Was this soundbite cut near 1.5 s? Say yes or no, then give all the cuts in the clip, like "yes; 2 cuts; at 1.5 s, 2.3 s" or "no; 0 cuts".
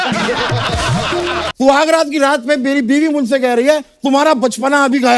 yes; 1 cut; at 1.5 s